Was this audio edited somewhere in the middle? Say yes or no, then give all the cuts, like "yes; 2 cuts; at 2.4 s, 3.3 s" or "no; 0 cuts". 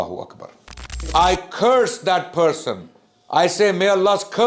yes; 1 cut; at 1.0 s